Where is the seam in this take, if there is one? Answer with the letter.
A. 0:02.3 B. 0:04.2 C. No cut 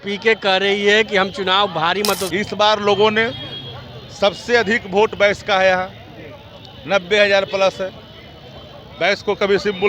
A